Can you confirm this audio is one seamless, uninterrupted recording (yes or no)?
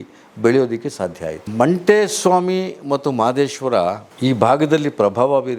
no